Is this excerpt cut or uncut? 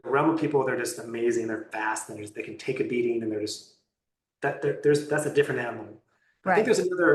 uncut